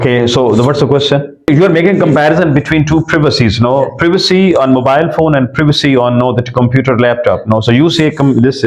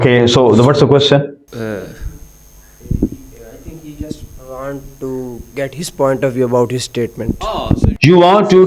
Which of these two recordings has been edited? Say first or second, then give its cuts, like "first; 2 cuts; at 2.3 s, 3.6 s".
second; 1 cut; at 1.3 s